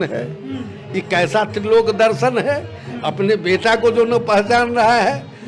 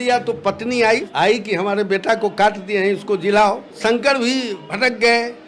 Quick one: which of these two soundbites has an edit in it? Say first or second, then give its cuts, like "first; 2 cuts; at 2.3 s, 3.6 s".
second; 3 cuts; at 1.1 s, 3.8 s, 4.6 s